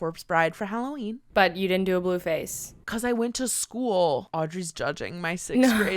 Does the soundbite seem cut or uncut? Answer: cut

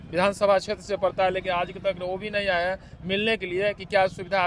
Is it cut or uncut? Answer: uncut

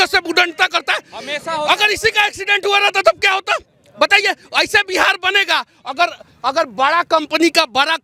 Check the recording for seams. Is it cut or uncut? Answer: uncut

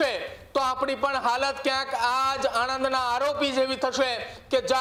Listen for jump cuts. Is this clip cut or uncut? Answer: uncut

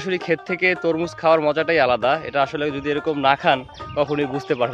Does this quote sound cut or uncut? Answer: uncut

